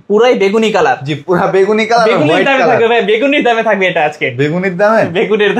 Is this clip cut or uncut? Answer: uncut